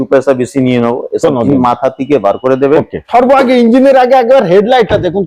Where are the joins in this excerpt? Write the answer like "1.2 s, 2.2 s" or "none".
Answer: 3.1 s